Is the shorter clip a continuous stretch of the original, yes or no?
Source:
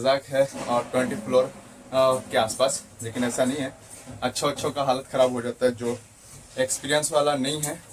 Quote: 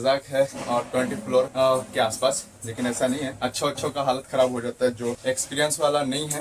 no